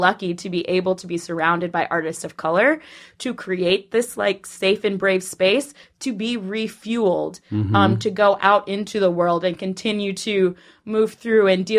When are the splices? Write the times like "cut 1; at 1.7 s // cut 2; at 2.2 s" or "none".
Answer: none